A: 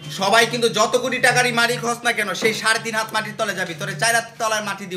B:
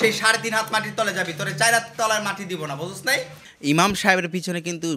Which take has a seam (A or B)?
B